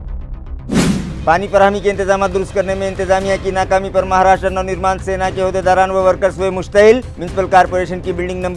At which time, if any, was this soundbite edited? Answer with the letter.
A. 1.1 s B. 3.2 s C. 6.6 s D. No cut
A